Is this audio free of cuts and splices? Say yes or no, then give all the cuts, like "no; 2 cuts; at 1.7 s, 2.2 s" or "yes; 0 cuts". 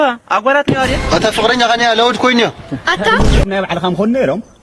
no; 1 cut; at 3.4 s